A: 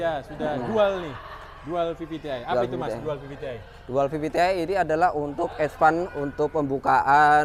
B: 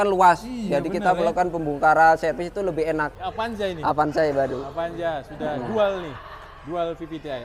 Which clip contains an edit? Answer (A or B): B